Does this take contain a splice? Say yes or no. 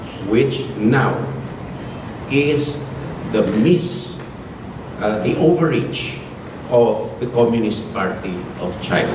no